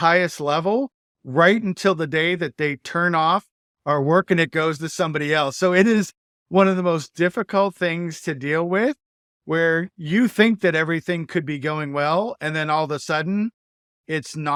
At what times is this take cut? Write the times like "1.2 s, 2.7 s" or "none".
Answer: none